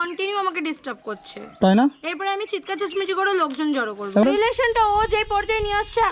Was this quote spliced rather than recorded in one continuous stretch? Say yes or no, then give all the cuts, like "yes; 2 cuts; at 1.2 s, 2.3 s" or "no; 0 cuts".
yes; 1 cut; at 4.2 s